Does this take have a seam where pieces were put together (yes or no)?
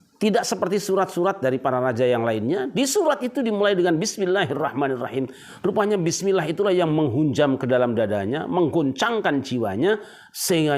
no